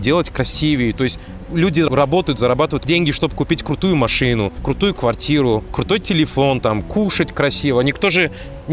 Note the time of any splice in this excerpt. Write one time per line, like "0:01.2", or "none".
0:01.9
0:02.8
0:04.6
0:05.7